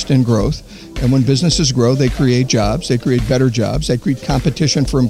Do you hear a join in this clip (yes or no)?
no